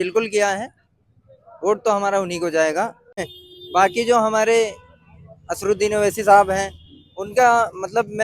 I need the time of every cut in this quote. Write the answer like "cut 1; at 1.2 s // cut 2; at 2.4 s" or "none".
cut 1; at 3.3 s